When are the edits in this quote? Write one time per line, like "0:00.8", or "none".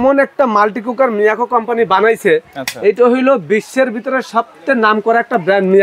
none